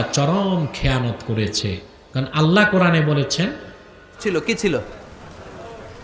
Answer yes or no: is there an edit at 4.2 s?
yes